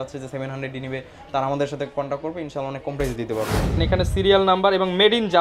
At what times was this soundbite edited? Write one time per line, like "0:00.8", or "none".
0:03.8